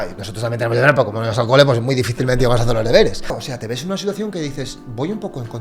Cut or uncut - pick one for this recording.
cut